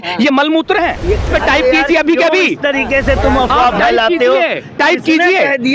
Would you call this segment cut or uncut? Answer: cut